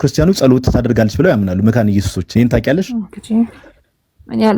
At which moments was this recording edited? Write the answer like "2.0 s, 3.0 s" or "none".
2.2 s